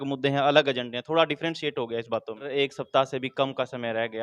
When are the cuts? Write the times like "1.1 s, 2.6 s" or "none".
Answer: 2.5 s